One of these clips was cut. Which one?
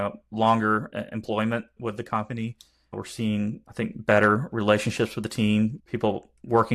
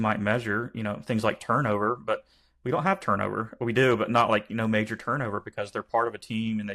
first; 4 cuts; at 1.8 s, 2.9 s, 3.7 s, 5.8 s

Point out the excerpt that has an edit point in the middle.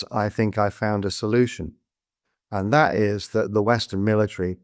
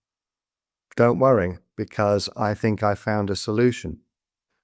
first; 1 cut; at 3.6 s

